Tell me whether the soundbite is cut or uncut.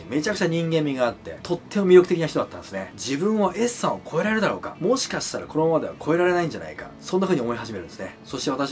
uncut